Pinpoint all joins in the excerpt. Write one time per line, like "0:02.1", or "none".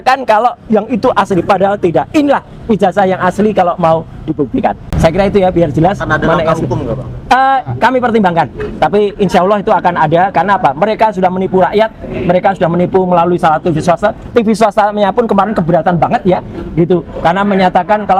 none